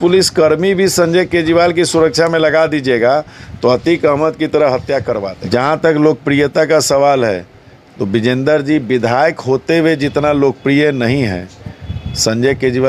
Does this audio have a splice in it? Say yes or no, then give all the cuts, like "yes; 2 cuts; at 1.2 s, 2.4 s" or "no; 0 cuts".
yes; 1 cut; at 5.4 s